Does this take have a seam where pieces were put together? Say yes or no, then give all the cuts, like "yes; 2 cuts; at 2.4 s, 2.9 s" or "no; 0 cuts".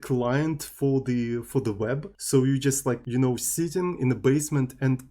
yes; 2 cuts; at 2.1 s, 3.0 s